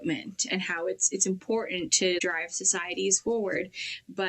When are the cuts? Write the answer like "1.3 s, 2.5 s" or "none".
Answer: 2.2 s

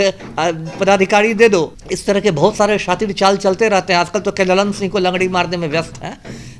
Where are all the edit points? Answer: 1.8 s

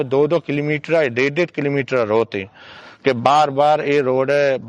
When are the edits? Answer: 2.8 s

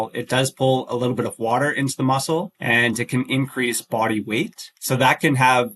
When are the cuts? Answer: 2.5 s, 4.7 s

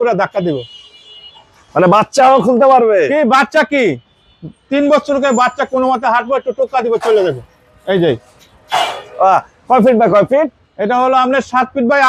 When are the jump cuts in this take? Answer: none

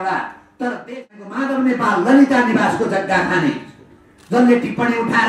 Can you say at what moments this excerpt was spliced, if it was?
1.3 s

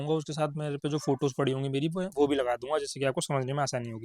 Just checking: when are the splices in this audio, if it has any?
none

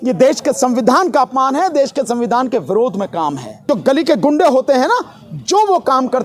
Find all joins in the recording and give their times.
3.5 s

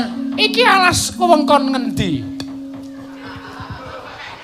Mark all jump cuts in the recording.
2.9 s

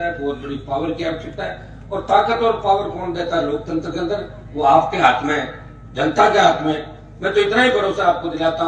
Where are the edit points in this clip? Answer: none

